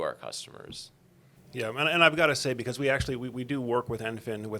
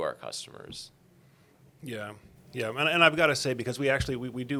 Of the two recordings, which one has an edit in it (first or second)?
first